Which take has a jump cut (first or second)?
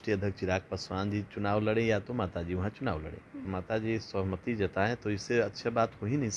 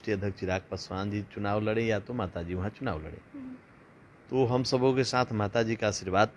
first